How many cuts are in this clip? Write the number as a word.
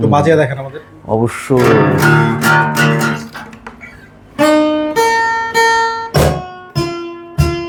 zero